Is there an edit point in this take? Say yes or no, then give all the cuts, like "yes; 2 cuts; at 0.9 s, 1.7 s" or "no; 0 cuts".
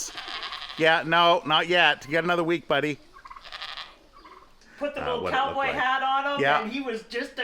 yes; 1 cut; at 4.6 s